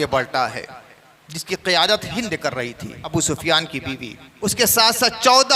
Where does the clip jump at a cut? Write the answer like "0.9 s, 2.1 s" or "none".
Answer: 3.1 s, 4.2 s

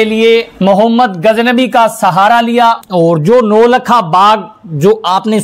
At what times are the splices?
2.8 s

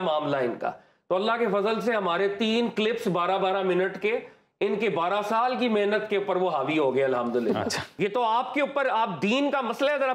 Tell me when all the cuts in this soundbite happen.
7.8 s

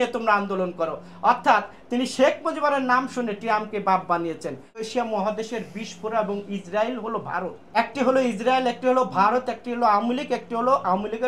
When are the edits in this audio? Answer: 4.9 s, 7.6 s

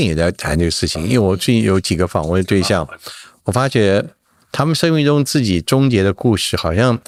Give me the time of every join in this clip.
none

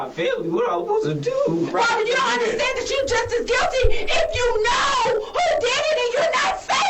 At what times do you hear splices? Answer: 1.4 s

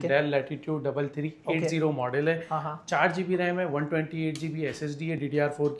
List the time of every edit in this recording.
none

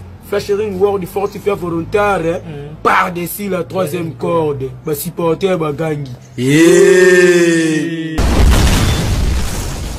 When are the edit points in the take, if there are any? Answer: 8.1 s

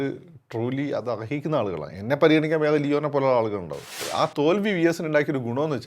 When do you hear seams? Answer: 4.0 s

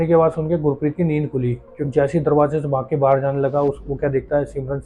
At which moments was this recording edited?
1.7 s

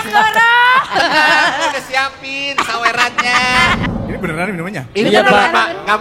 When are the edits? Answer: 3.9 s

